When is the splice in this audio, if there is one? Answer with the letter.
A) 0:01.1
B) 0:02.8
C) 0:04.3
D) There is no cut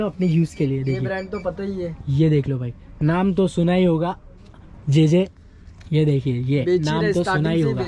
D